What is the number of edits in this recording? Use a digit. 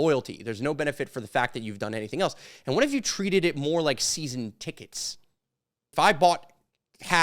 1